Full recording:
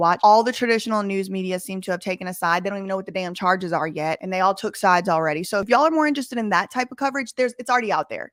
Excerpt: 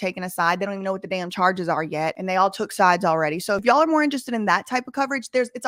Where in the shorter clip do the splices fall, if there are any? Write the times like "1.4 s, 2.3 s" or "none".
none